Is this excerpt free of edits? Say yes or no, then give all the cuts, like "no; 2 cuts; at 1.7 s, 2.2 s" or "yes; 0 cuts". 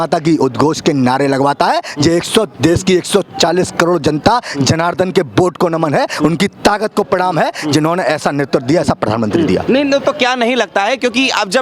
yes; 0 cuts